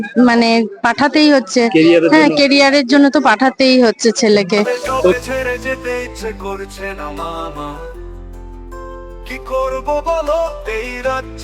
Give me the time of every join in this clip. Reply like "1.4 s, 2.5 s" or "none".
5.2 s